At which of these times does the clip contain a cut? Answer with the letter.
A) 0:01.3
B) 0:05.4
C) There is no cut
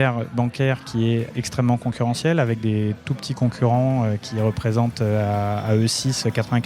A